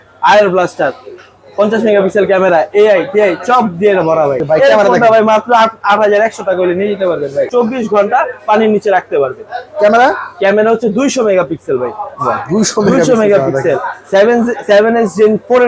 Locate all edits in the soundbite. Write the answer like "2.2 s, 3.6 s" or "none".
4.4 s, 7.5 s

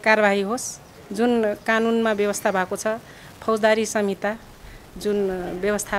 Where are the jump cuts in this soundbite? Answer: none

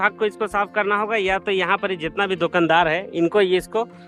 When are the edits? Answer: none

